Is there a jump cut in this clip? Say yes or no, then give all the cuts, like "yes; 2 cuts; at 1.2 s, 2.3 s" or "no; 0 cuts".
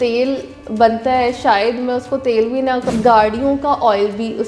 yes; 1 cut; at 2.8 s